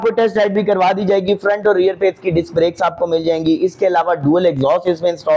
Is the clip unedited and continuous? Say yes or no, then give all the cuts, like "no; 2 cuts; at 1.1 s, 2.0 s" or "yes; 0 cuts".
yes; 0 cuts